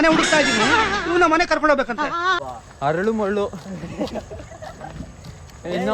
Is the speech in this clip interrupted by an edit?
yes; 1 cut; at 2.4 s

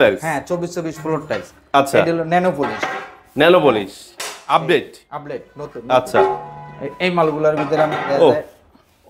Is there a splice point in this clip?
no; 0 cuts

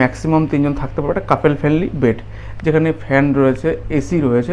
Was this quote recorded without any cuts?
yes; 0 cuts

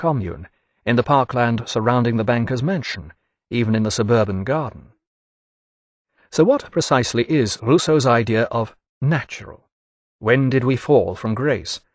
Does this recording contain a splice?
yes; 1 cut; at 9.6 s

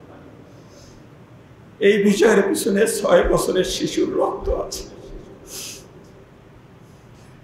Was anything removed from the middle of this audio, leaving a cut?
no; 0 cuts

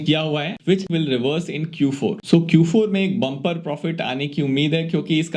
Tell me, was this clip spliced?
yes; 2 cuts; at 0.8 s, 2.2 s

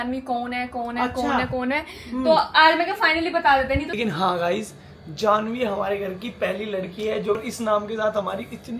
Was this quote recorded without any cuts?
no; 2 cuts; at 3.9 s, 7.4 s

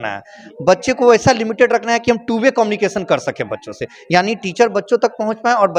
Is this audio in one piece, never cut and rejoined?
yes; 0 cuts

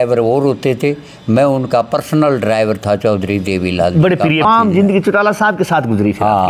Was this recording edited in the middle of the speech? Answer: yes; 1 cut; at 4.4 s

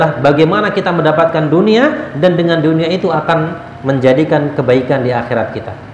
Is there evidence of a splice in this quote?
no; 0 cuts

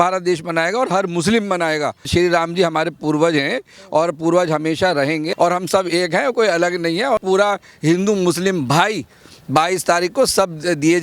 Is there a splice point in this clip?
yes; 3 cuts; at 2.0 s, 5.3 s, 7.2 s

